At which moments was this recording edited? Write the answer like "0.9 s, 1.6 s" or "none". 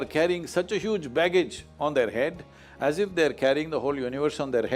none